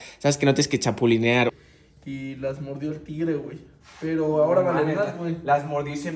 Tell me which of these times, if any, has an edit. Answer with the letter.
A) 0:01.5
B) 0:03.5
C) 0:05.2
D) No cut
A